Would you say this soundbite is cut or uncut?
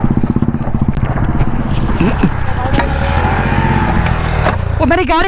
cut